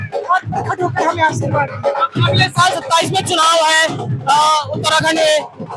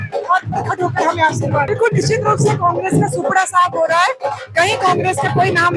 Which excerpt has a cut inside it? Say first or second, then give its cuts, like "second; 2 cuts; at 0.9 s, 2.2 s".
second; 1 cut; at 1.7 s